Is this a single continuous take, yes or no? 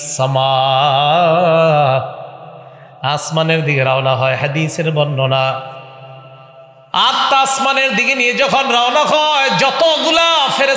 yes